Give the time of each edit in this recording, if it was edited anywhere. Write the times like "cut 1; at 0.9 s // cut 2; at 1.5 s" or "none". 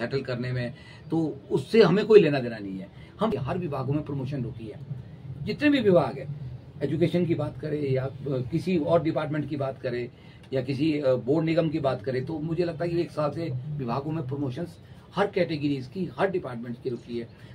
cut 1; at 3.3 s